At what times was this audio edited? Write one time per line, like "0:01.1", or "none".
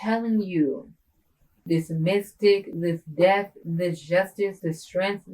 0:01.5